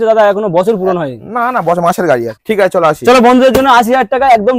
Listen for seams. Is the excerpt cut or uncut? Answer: cut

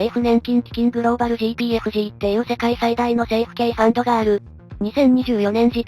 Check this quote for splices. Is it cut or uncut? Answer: uncut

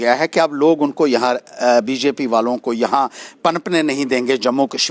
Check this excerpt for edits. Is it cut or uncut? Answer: uncut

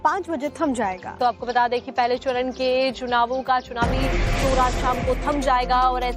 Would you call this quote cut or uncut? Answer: cut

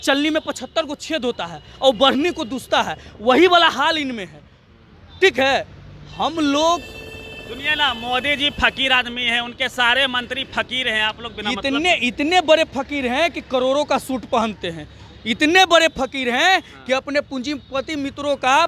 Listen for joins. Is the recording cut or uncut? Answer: uncut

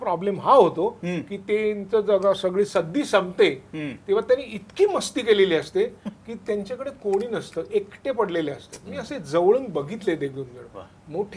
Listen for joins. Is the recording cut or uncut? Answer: uncut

